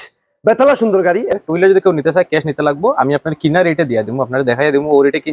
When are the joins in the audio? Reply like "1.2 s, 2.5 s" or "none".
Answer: 1.3 s